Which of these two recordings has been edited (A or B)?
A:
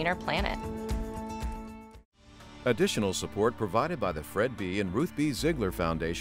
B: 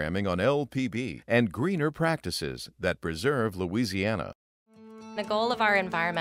A